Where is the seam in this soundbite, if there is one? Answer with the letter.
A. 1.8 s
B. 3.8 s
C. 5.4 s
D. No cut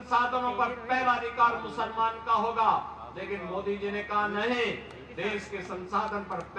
D